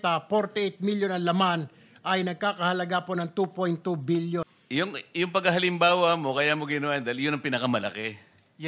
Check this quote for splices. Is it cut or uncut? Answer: cut